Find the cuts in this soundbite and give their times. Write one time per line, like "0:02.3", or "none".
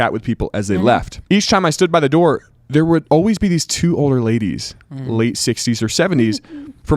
0:01.1
0:03.0